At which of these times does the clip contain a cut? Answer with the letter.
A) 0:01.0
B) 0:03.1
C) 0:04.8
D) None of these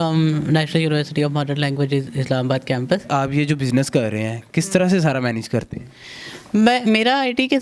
B